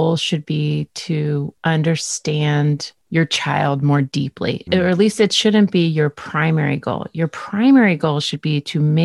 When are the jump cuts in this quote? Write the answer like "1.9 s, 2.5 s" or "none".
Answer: 1.5 s, 2.9 s, 4.7 s